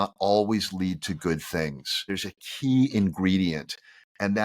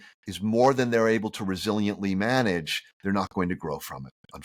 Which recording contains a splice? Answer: first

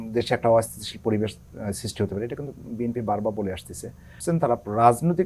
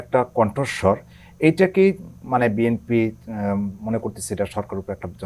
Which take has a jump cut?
first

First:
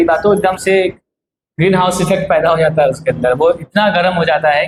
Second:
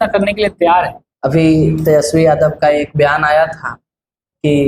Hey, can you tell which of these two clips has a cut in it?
second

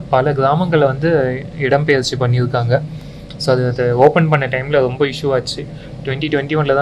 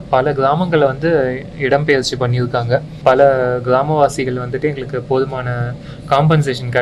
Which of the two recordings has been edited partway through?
second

